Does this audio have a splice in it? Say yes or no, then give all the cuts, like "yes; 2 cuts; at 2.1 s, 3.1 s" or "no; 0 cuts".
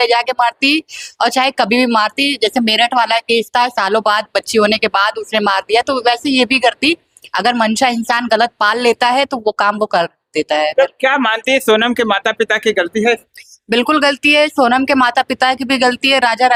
no; 0 cuts